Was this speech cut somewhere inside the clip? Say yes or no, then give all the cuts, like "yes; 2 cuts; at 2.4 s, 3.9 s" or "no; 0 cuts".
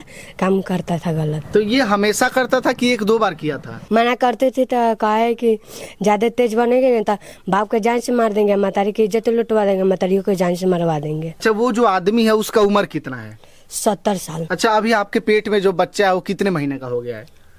yes; 4 cuts; at 1.4 s, 3.8 s, 11.3 s, 14.3 s